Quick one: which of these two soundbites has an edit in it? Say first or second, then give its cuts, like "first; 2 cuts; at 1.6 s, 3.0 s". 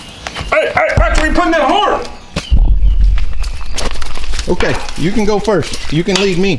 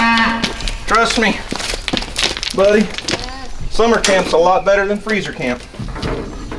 first; 1 cut; at 2.4 s